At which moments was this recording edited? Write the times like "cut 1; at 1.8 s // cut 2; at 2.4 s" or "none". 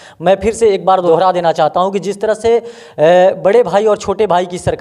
cut 1; at 1.0 s